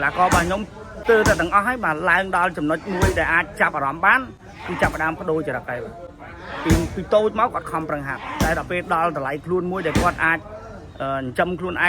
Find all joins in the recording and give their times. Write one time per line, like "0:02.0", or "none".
0:00.9